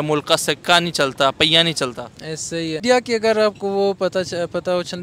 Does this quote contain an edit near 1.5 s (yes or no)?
no